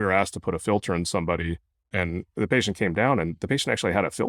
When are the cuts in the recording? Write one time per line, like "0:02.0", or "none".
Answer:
0:01.8

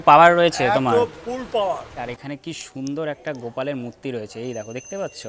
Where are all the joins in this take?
0:02.1

